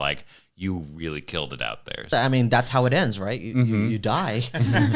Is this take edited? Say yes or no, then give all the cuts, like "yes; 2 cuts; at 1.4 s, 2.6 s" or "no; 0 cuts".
yes; 1 cut; at 2.1 s